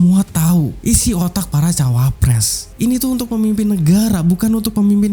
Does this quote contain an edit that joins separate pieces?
yes; 1 cut; at 2.5 s

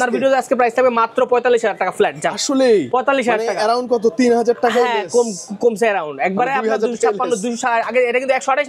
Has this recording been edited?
no; 0 cuts

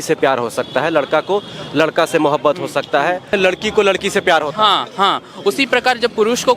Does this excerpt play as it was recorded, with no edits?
no; 1 cut; at 3.3 s

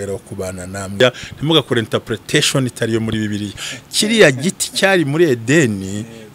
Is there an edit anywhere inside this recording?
yes; 1 cut; at 1.0 s

